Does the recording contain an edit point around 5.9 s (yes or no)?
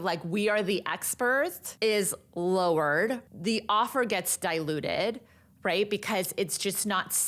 no